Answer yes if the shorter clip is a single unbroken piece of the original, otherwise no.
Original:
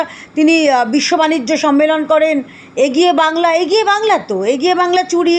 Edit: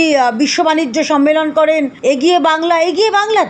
no